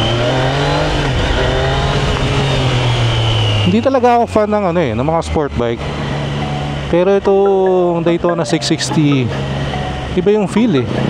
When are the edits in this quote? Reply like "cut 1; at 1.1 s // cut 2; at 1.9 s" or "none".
none